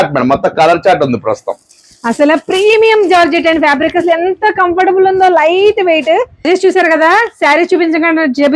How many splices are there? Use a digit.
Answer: 1